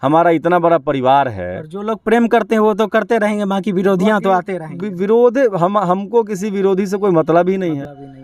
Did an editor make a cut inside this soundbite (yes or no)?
no